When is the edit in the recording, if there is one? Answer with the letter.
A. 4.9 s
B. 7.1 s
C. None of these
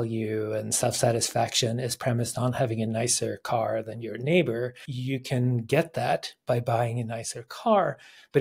A